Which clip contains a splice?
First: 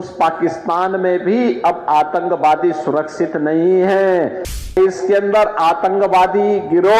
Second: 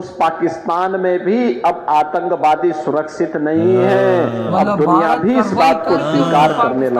first; 1 cut; at 4.7 s

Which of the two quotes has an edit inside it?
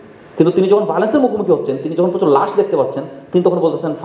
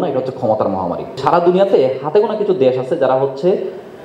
second; 1 cut; at 1.2 s

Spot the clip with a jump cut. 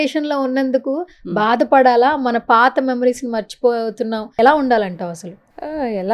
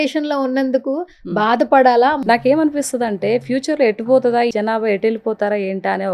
second; 2 cuts; at 2.2 s, 4.5 s

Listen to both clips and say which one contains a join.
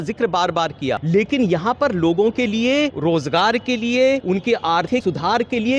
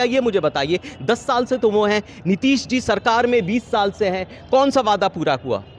first; 3 cuts; at 1.0 s, 2.9 s, 4.6 s

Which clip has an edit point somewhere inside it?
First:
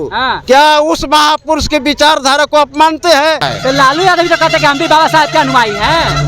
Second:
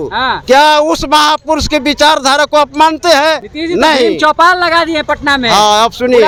first; 1 cut; at 3.5 s

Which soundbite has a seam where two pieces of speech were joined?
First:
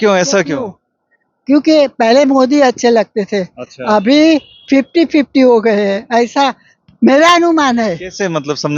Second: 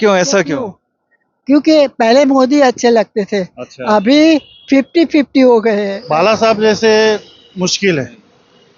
second; 1 cut; at 5.9 s

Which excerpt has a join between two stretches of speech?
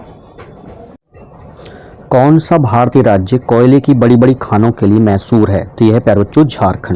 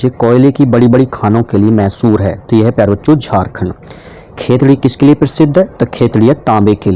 first; 1 cut; at 1.0 s

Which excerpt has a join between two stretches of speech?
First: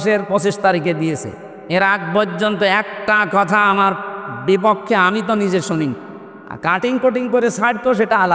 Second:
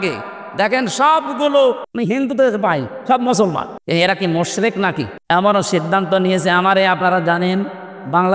second; 3 cuts; at 1.9 s, 3.7 s, 5.2 s

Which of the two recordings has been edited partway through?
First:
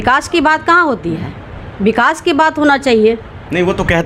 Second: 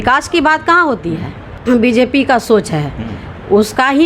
second; 1 cut; at 1.6 s

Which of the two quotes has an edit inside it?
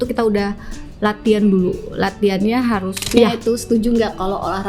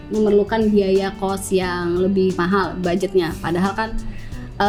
first; 1 cut; at 3.1 s

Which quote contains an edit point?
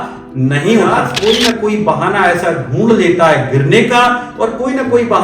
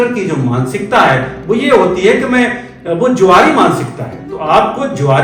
first; 1 cut; at 1.1 s

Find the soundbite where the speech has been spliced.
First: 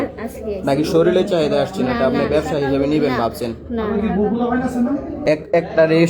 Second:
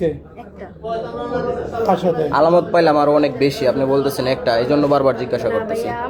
first; 1 cut; at 5.1 s

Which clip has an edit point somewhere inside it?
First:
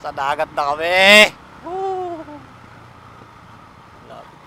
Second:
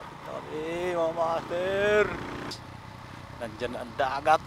second; 1 cut; at 2.4 s

